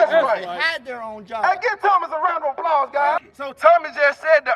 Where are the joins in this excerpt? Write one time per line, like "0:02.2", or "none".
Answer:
0:03.2